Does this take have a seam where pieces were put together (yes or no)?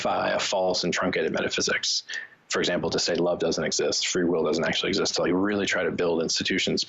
no